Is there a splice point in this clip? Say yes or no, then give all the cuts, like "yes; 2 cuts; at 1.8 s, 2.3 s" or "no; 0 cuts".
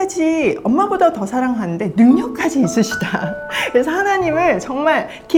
no; 0 cuts